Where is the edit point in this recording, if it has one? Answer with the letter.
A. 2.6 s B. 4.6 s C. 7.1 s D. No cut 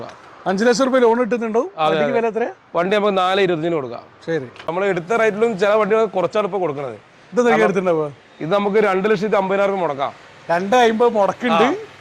B